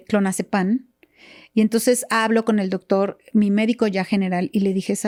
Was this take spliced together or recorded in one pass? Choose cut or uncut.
uncut